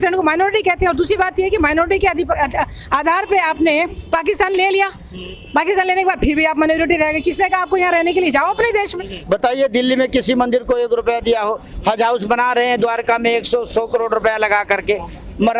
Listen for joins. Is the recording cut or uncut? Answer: cut